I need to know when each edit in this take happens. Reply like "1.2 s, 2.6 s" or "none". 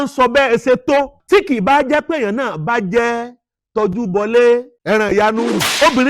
1.2 s

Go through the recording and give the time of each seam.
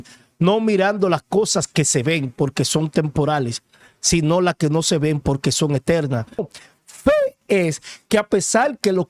6.5 s

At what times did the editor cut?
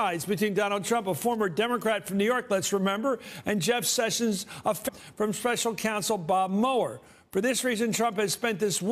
none

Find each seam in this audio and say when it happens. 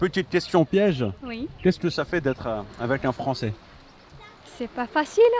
none

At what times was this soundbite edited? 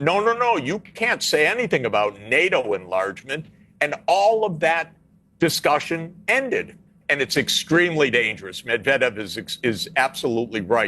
6.6 s

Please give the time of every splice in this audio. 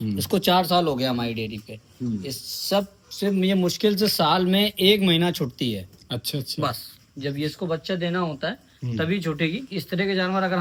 none

